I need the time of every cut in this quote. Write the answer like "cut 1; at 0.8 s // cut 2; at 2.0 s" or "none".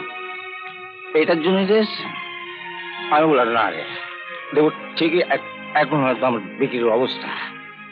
none

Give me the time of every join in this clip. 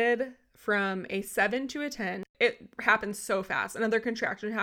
cut 1; at 2.3 s

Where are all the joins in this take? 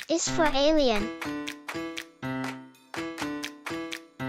cut 1; at 1.0 s

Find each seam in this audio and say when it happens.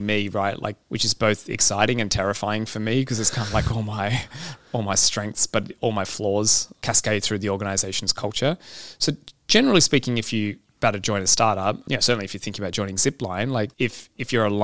cut 1; at 0.8 s // cut 2; at 6.7 s // cut 3; at 10.7 s // cut 4; at 11.8 s // cut 5; at 13.7 s

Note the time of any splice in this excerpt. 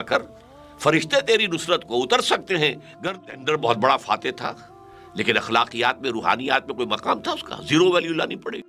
cut 1; at 3.3 s

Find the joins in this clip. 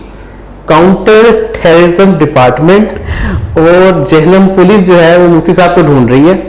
none

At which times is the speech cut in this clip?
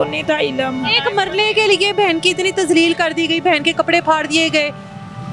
cut 1; at 0.9 s

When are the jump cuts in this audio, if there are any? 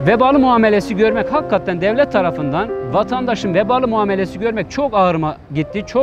none

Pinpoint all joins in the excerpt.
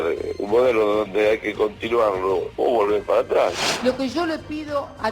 cut 1; at 2.5 s // cut 2; at 3.7 s

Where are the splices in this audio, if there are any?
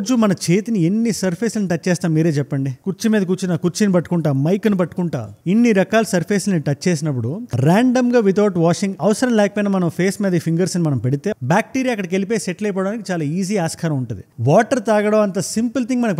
cut 1; at 5.3 s // cut 2; at 11.3 s // cut 3; at 14.2 s

